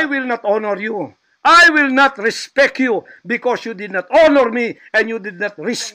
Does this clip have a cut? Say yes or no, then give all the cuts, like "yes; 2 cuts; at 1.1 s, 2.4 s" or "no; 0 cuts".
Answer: no; 0 cuts